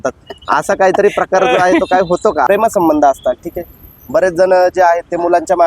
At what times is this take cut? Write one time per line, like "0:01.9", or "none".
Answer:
0:02.5

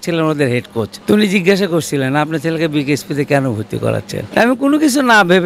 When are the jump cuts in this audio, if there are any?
0:00.9
0:04.2

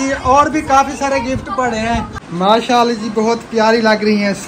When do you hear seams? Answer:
0:02.2

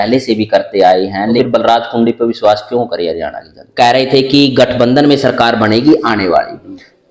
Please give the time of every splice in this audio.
0:01.4
0:03.6

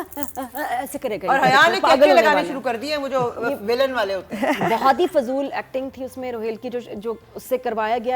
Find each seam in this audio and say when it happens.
none

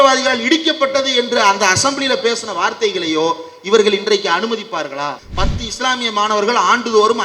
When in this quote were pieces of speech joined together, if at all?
0:05.2

